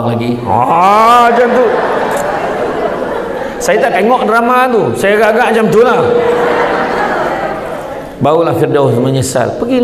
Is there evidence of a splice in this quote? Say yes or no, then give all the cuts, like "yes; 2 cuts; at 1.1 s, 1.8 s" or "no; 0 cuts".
no; 0 cuts